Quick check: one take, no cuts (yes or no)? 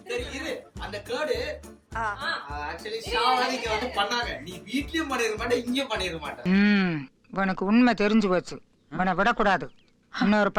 yes